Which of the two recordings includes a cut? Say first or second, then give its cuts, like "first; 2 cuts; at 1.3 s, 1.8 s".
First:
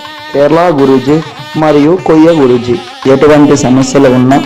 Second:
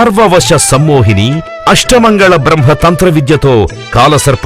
first; 1 cut; at 2.9 s